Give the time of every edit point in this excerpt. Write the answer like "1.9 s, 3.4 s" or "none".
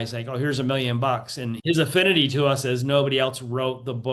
1.6 s